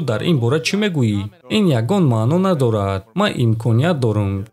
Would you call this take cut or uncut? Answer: cut